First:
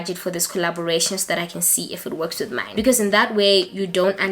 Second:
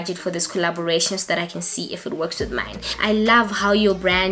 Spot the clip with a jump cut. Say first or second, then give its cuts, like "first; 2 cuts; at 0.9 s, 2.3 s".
second; 1 cut; at 2.7 s